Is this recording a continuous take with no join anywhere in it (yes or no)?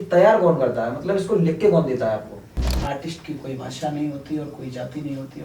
no